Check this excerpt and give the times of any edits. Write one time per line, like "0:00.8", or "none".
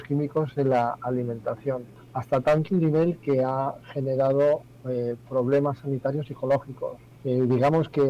0:02.0
0:07.0